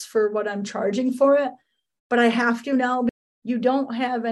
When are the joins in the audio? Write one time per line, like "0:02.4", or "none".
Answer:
0:03.1